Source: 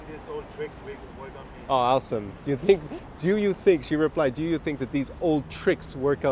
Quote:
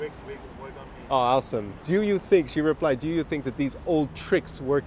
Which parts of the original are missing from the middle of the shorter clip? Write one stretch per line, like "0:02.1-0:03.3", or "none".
0:02.3-0:03.1